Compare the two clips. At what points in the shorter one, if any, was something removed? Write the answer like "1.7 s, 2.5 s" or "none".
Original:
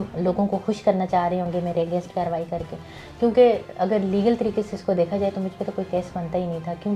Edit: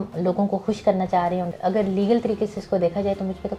1.5 s